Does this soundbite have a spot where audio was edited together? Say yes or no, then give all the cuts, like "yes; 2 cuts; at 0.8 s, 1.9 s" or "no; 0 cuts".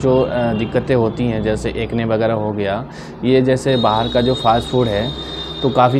no; 0 cuts